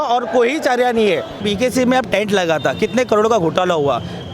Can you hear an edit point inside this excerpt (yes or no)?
yes